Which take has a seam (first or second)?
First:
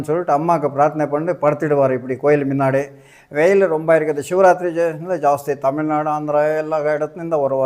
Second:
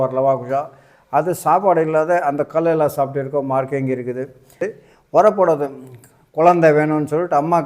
second